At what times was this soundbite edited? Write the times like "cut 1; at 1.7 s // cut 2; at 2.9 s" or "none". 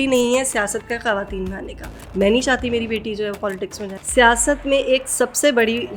cut 1; at 1.9 s // cut 2; at 3.9 s